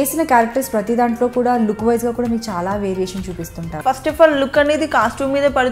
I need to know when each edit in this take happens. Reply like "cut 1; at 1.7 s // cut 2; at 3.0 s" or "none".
cut 1; at 3.8 s